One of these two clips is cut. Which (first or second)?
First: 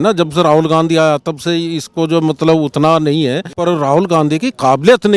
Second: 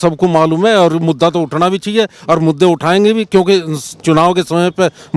first